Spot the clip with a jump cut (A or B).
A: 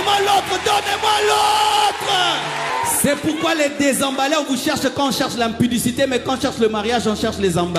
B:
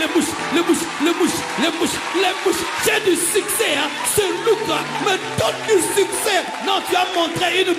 A